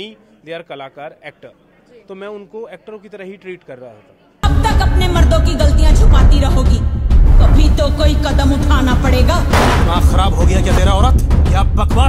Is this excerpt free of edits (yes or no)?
no